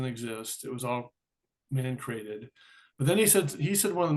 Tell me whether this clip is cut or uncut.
uncut